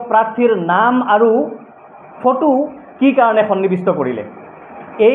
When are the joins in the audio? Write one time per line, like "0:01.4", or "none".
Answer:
none